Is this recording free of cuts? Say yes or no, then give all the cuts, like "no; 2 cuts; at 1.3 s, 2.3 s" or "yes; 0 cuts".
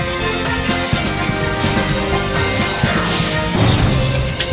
yes; 0 cuts